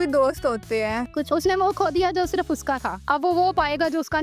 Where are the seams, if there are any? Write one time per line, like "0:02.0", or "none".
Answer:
0:01.0
0:02.9